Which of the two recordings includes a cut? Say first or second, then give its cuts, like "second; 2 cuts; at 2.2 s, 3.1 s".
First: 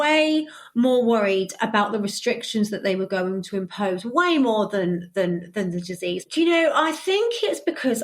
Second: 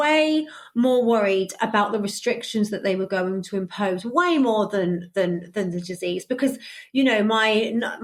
first; 1 cut; at 6.2 s